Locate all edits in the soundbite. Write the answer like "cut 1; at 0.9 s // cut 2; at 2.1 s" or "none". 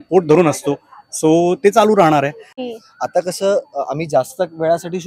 cut 1; at 2.6 s